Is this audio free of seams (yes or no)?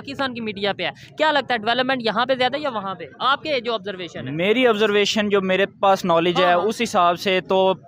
yes